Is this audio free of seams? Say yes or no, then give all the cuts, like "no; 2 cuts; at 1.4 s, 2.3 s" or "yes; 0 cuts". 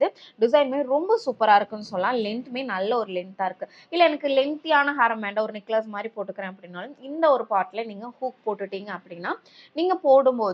yes; 0 cuts